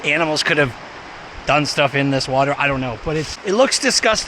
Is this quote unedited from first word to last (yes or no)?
no